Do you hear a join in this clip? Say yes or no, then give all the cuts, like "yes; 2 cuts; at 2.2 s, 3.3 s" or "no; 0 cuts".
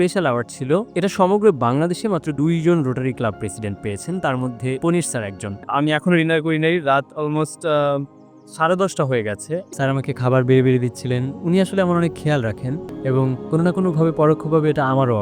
yes; 3 cuts; at 5.7 s, 9.6 s, 12.8 s